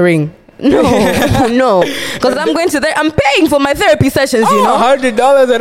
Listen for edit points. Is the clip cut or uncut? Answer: uncut